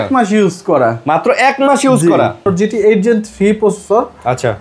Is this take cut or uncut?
cut